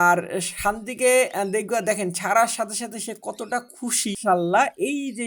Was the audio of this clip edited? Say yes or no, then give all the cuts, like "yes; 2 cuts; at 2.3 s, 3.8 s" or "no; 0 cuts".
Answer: yes; 1 cut; at 4.2 s